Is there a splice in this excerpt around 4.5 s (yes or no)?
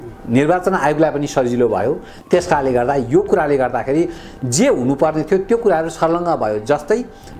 no